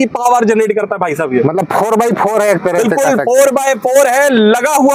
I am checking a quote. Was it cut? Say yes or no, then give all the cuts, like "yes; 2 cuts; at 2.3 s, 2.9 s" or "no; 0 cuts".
no; 0 cuts